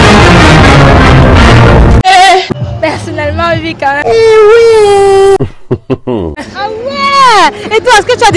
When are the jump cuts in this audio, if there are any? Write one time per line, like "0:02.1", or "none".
0:02.6